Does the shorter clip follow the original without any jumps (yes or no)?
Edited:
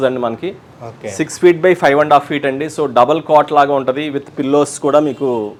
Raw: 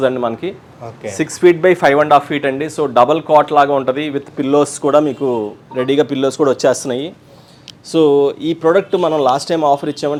yes